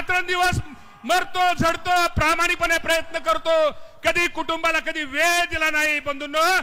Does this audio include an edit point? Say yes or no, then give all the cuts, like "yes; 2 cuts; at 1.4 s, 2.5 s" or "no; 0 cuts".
no; 0 cuts